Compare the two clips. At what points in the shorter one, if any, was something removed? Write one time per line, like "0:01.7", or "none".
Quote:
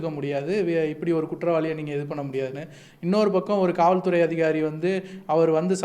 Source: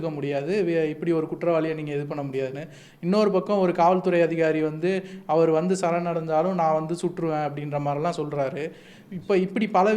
none